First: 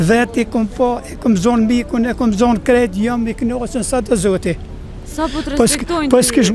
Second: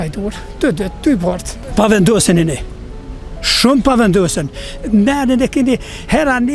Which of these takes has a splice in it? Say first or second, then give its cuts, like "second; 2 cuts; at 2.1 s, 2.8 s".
second; 1 cut; at 1.5 s